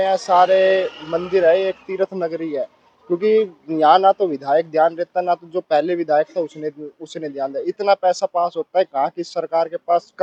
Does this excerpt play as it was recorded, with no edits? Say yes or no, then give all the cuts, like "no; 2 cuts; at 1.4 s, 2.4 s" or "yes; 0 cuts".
yes; 0 cuts